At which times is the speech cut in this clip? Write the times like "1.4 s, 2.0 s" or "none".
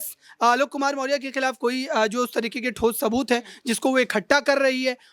none